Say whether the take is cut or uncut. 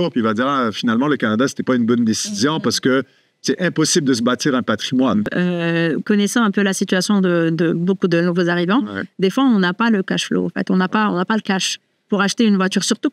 cut